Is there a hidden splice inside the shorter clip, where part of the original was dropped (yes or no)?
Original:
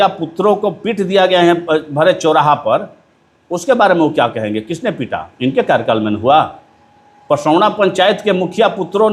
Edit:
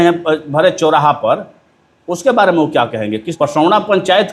yes